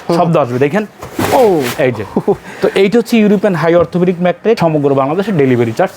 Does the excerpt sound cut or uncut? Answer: cut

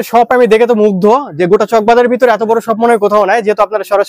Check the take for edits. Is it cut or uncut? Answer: uncut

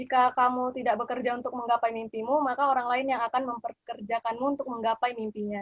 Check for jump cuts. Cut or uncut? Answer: uncut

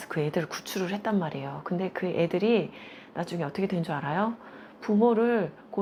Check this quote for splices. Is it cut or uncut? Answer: uncut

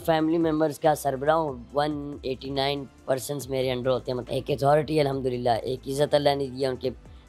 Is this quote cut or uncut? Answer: cut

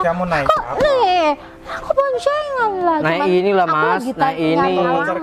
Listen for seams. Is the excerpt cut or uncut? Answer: uncut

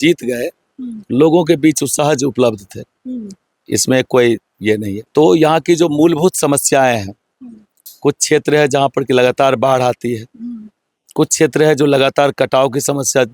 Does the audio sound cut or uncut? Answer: cut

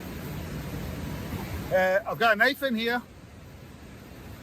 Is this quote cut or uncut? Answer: cut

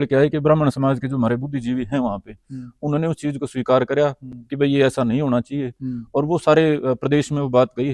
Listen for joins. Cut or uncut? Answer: uncut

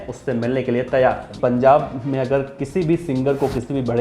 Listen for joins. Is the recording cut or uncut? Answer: cut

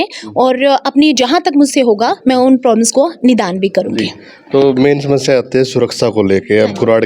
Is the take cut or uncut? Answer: uncut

